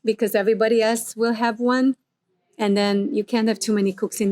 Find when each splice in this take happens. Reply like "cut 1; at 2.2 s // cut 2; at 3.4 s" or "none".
none